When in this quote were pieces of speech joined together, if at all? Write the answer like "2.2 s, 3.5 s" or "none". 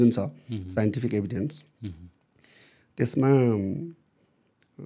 none